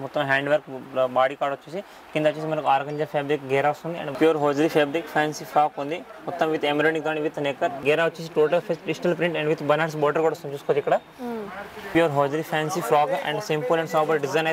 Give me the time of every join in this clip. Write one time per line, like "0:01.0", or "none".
0:04.1
0:07.8
0:11.5